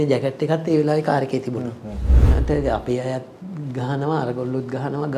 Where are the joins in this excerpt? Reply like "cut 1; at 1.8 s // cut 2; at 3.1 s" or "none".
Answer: cut 1; at 2.2 s